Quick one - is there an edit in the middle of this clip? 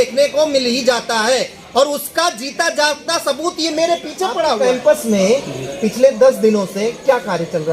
yes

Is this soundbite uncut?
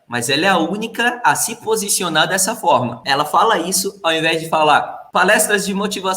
no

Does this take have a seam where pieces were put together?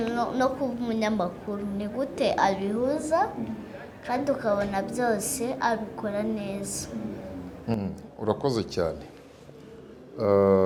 no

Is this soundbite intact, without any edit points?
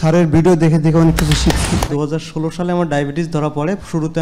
no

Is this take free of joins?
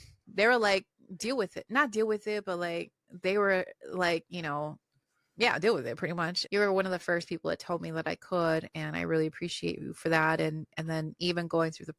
no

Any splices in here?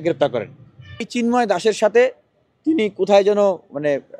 yes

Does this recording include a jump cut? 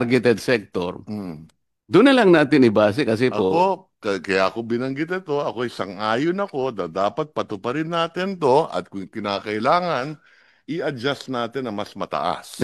no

